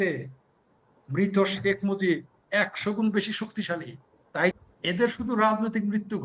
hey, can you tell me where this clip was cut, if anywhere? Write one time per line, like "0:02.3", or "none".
0:04.5